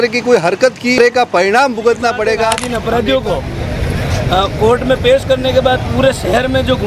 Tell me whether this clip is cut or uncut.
cut